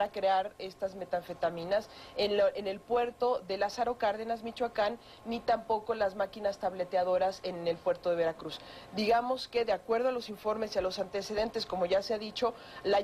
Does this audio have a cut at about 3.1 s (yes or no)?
yes